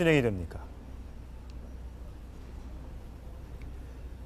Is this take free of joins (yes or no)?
yes